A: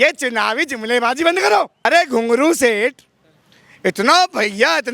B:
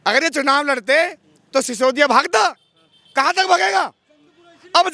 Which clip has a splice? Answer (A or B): A